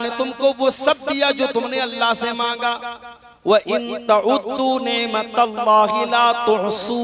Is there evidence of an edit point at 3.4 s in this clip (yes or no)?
no